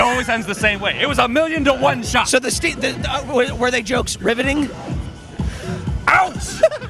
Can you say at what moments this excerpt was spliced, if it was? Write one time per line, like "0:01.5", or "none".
none